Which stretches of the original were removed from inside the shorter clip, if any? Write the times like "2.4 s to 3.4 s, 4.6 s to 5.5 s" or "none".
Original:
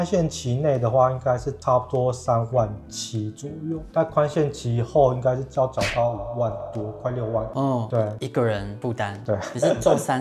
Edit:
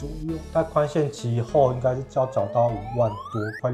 none